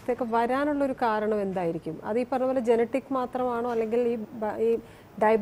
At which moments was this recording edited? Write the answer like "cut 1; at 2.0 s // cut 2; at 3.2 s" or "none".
none

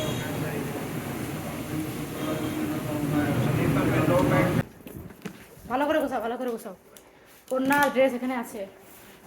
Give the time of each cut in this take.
cut 1; at 4.6 s

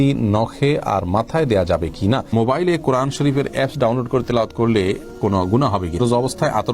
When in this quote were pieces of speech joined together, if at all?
cut 1; at 2.3 s // cut 2; at 6.0 s

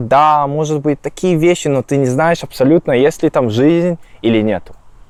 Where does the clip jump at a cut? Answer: none

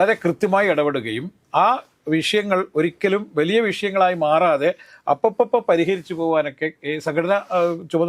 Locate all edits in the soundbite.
none

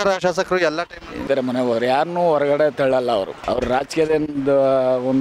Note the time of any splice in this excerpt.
cut 1; at 1.2 s // cut 2; at 3.4 s

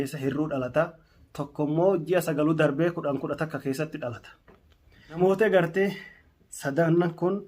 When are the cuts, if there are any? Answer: cut 1; at 5.2 s

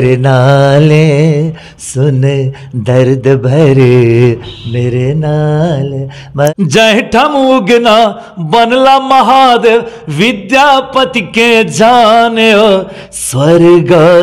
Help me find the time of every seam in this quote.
cut 1; at 6.5 s

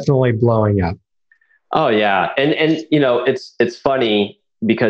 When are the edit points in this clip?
none

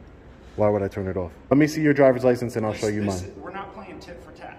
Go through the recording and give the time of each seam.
cut 1; at 1.5 s

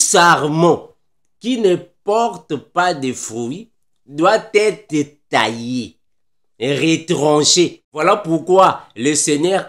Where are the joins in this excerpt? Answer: cut 1; at 7.9 s

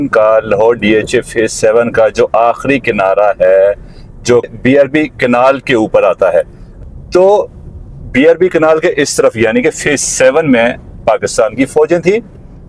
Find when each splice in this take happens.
cut 1; at 4.5 s // cut 2; at 6.6 s

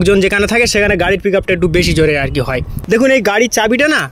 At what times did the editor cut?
cut 1; at 2.7 s

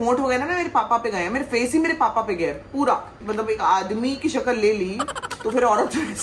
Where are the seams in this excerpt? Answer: cut 1; at 3.2 s

